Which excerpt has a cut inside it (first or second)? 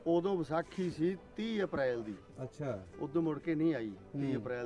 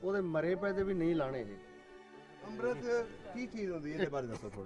second